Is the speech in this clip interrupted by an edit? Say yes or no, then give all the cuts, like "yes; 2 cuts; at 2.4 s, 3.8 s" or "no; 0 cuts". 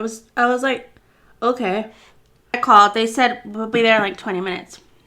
yes; 1 cut; at 2.6 s